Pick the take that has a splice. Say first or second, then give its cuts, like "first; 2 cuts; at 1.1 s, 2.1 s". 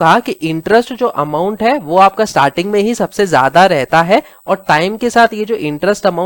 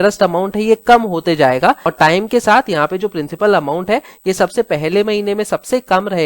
second; 1 cut; at 1.9 s